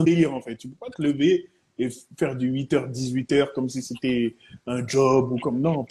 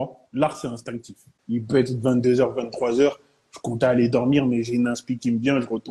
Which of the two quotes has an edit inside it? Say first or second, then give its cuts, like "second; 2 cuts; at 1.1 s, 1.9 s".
second; 1 cut; at 1.3 s